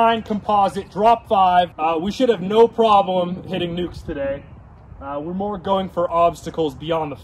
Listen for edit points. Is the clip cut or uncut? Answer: cut